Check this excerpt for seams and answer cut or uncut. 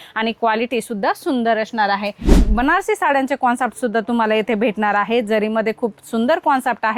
cut